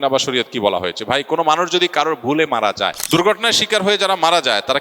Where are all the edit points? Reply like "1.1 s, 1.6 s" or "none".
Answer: 3.0 s

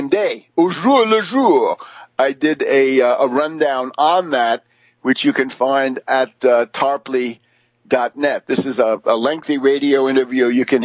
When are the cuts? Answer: none

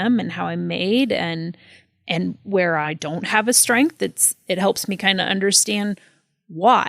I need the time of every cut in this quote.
2.9 s

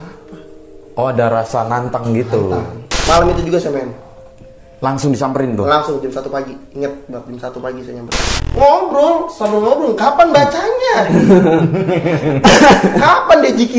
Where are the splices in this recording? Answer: 2.8 s, 8.3 s

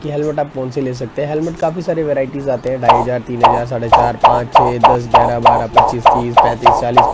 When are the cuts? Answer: none

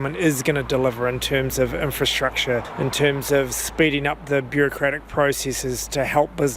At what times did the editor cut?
2.7 s

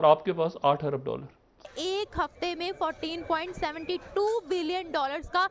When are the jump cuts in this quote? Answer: 1.7 s

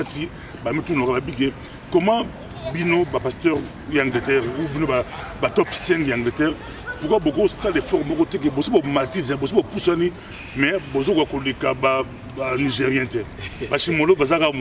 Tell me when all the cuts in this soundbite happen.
none

